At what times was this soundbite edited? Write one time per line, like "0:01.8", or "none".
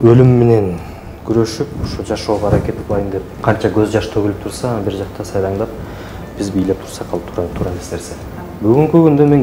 0:03.3
0:08.5